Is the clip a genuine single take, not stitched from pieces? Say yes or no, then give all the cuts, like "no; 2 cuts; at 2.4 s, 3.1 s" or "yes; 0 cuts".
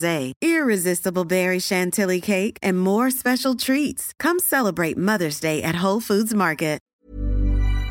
no; 1 cut; at 6.8 s